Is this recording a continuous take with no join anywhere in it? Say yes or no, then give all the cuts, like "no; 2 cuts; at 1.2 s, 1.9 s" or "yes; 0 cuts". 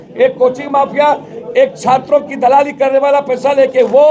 yes; 0 cuts